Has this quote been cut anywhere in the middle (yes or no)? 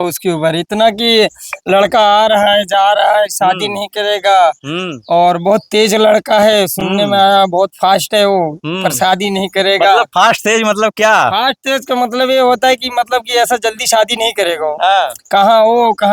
no